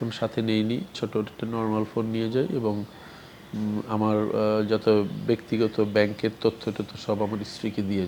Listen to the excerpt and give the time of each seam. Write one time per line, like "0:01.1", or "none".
none